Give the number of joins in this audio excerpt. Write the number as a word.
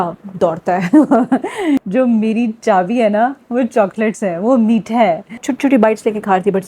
two